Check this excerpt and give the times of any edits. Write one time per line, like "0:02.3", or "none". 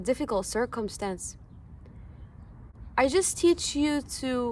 none